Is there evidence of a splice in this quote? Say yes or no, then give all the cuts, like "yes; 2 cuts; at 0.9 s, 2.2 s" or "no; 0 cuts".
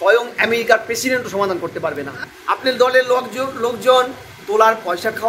yes; 1 cut; at 2.1 s